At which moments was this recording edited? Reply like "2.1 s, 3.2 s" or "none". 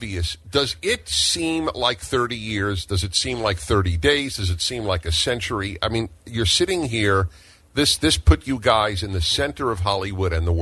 none